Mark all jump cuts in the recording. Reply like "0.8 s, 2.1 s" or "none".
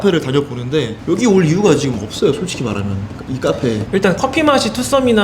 3.8 s